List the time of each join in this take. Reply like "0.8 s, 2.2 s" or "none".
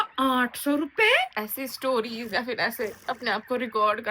1.4 s